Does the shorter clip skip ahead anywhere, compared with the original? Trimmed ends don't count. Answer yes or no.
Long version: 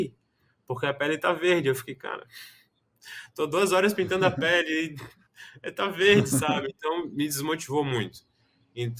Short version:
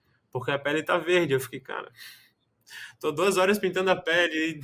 no